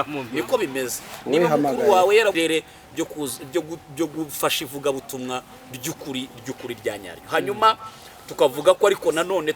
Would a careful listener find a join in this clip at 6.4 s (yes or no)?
no